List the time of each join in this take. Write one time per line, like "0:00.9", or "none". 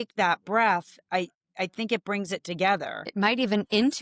0:03.0